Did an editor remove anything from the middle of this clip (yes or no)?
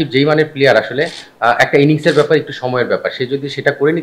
no